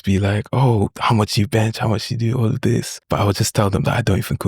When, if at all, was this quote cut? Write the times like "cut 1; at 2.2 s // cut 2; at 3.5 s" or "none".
cut 1; at 3.0 s